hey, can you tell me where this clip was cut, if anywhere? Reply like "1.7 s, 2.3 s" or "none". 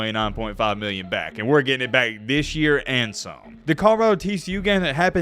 3.5 s